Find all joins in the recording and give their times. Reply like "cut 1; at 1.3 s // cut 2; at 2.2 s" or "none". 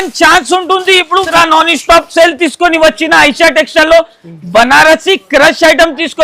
cut 1; at 1.3 s